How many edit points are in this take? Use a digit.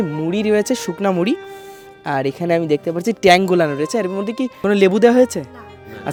0